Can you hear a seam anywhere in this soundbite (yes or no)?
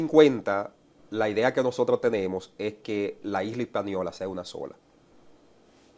no